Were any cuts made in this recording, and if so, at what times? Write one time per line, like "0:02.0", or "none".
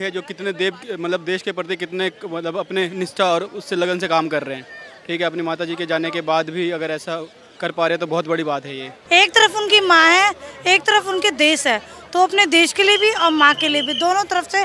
0:09.0